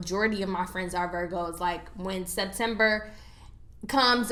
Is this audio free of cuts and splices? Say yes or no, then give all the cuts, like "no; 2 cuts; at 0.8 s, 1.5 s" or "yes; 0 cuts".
yes; 0 cuts